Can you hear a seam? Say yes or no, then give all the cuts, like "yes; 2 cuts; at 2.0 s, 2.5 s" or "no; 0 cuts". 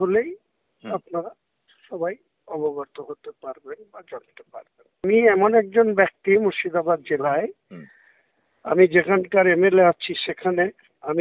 yes; 1 cut; at 5.0 s